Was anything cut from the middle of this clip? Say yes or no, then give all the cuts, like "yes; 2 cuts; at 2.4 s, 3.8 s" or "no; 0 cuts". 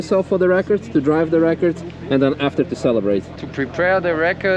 yes; 1 cut; at 3.4 s